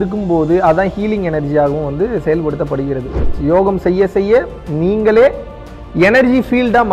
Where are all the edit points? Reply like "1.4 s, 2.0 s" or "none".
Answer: 3.4 s